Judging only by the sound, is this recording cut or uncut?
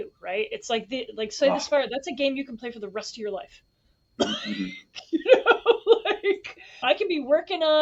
uncut